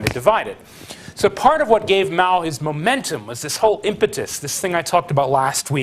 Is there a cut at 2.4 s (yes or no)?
yes